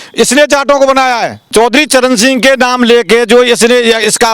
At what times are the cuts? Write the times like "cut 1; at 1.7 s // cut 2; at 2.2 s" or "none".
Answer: cut 1; at 1.5 s